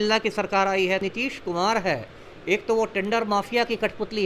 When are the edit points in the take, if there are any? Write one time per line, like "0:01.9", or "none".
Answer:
0:01.0